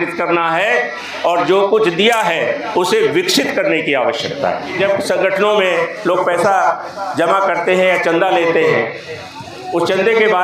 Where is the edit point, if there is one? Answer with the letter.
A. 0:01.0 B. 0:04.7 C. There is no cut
B